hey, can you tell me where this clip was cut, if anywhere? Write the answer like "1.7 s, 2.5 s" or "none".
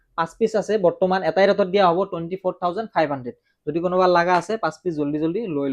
none